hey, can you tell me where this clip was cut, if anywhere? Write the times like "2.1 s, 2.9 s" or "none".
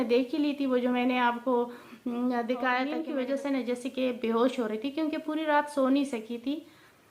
3.0 s